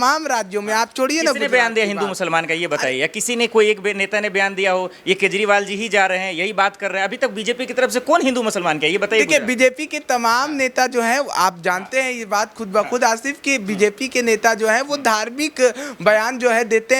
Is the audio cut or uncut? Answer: uncut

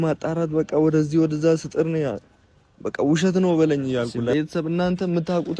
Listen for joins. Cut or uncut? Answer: cut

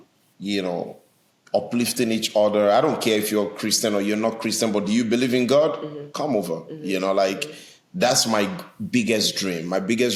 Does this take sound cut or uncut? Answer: uncut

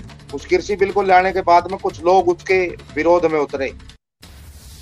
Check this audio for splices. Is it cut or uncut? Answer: cut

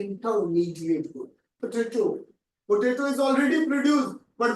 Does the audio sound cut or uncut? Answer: cut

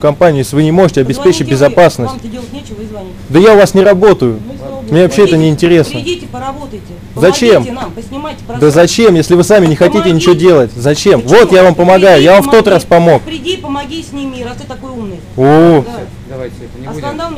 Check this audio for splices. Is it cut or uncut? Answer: uncut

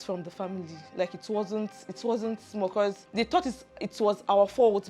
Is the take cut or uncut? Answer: cut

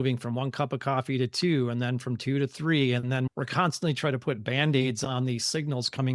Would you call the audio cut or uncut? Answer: uncut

